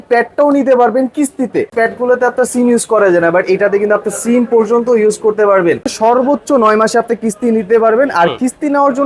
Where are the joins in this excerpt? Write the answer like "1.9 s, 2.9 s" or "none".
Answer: 1.7 s, 5.9 s